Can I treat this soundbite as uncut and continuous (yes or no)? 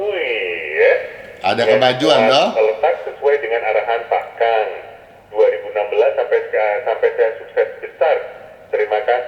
yes